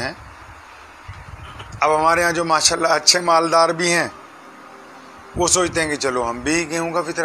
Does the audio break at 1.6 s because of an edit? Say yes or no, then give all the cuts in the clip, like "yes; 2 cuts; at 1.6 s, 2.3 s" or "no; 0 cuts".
yes; 1 cut; at 1.6 s